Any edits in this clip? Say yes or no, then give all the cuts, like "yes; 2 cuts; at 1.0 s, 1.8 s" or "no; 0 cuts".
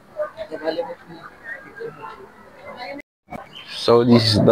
yes; 1 cut; at 3.0 s